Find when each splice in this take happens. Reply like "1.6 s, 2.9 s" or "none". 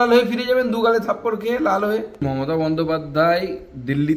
2.1 s